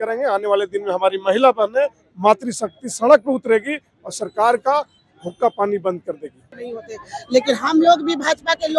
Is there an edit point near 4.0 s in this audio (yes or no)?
no